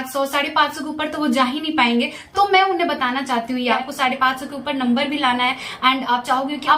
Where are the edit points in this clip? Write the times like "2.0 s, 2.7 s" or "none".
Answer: 3.8 s

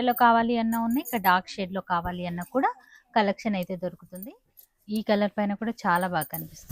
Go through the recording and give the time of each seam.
4.1 s

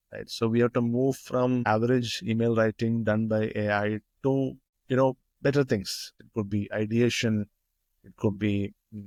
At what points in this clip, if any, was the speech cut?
none

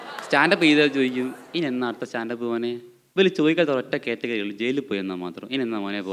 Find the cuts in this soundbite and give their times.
none

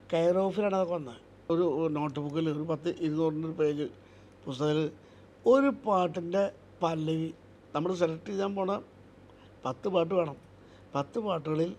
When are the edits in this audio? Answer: 1.5 s

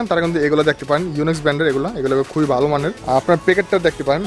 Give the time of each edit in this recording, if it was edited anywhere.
3.0 s

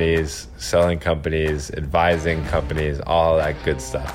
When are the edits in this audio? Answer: none

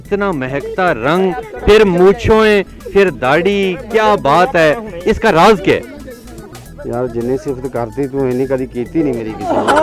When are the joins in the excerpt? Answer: none

